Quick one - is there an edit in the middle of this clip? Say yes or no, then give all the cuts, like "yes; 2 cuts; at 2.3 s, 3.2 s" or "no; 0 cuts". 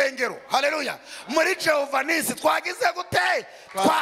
no; 0 cuts